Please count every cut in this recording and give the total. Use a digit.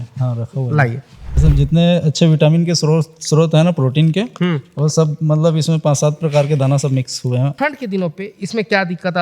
2